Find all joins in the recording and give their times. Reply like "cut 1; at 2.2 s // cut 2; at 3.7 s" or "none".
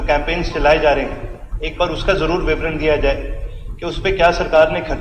none